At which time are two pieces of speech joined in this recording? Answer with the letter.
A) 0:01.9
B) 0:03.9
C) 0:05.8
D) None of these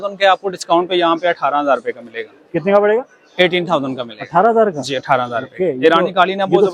D